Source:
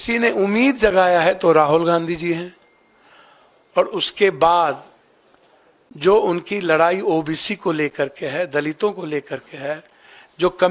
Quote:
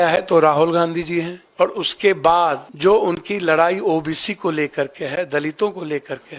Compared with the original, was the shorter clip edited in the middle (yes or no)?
yes